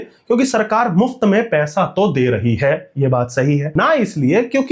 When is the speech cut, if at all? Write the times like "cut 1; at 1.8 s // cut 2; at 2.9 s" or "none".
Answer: cut 1; at 3.7 s